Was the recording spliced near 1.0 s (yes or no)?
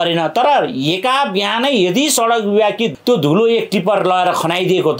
no